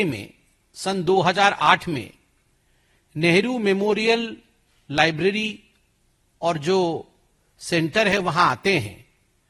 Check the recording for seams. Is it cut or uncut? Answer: uncut